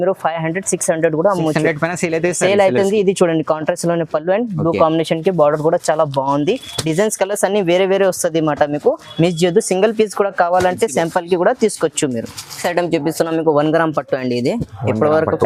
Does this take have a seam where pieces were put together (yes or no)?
no